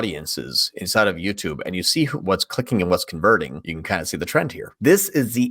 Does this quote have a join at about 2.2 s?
yes; 3 cuts; at 2.2 s, 3.7 s, 4.7 s

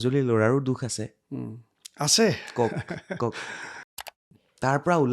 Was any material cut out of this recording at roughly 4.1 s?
yes; 1 cut; at 4.1 s

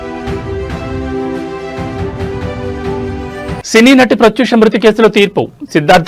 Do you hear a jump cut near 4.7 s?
no; 1 cut; at 3.3 s

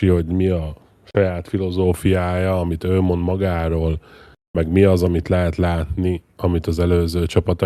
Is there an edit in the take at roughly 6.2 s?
no; 0 cuts

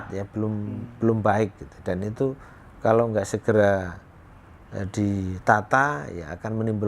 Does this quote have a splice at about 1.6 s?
no; 0 cuts

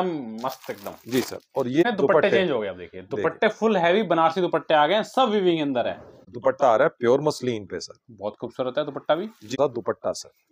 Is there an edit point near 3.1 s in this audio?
no; 3 cuts; at 1.8 s, 6.2 s, 9.5 s

